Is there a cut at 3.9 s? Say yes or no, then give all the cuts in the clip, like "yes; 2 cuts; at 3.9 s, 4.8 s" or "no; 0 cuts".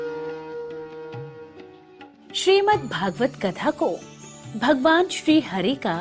no; 1 cut; at 2.2 s